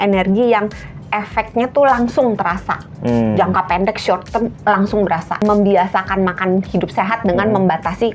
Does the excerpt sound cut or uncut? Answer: cut